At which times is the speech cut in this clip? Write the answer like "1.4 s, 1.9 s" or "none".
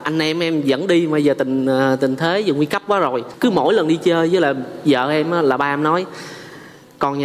3.3 s